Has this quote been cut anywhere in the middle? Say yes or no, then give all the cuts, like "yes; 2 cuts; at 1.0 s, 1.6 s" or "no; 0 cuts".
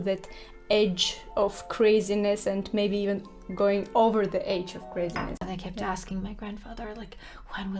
yes; 1 cut; at 5.5 s